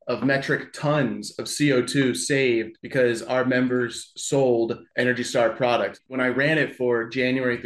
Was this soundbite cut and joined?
yes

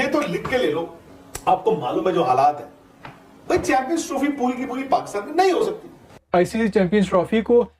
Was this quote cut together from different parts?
yes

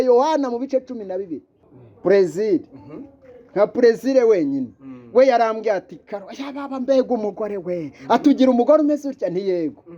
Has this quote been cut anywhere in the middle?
yes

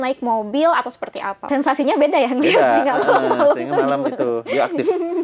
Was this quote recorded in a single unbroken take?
no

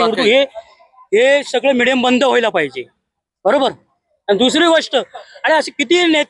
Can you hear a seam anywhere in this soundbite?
no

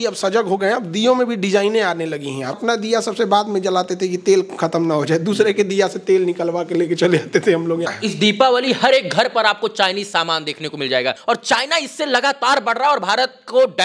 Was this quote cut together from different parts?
yes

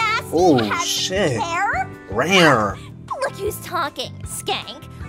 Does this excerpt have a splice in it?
yes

